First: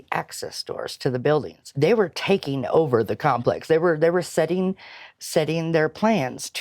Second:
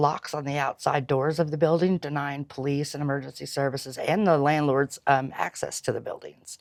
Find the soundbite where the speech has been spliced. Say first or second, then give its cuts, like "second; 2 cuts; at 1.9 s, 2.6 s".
first; 1 cut; at 1.6 s